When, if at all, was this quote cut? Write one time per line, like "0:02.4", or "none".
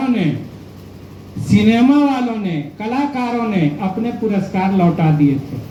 none